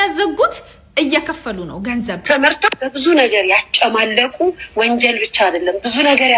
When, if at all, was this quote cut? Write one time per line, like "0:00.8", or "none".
0:02.2